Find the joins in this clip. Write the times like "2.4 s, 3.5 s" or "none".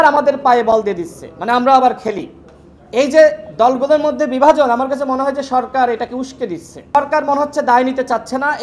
6.9 s